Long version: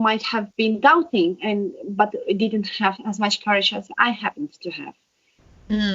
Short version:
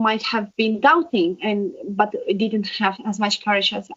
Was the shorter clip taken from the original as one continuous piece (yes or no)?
yes